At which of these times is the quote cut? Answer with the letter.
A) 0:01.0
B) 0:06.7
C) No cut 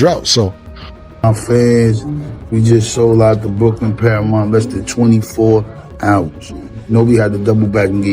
A